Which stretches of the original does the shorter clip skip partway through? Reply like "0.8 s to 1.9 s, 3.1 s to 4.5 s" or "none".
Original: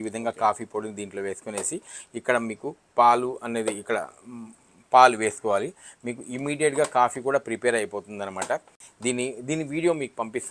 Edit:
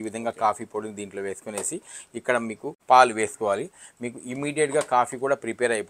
2.8 s to 4.8 s